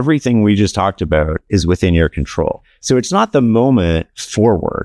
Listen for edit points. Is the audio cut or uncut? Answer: cut